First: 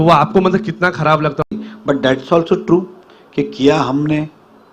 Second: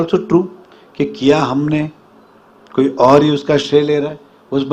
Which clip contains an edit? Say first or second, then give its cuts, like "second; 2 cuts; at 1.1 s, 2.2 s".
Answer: first; 1 cut; at 1.5 s